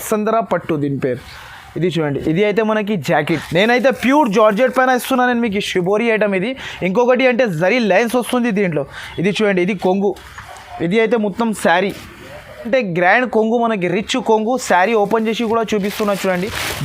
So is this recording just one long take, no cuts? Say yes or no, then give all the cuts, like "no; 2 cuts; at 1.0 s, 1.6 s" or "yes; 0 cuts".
no; 2 cuts; at 3.4 s, 12.7 s